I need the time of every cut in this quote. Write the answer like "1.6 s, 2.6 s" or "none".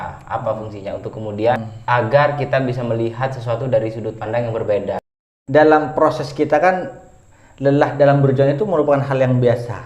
1.7 s, 5.2 s